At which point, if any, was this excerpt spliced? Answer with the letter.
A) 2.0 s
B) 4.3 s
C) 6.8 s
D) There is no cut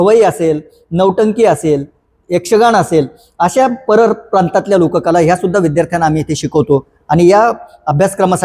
D